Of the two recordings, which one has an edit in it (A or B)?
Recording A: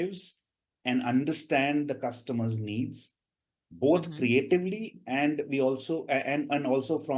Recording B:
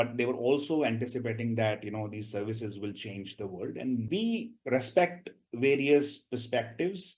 B